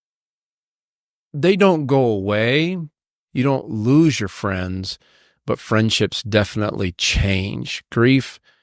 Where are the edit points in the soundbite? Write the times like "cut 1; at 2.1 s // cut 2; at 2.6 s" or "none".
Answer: none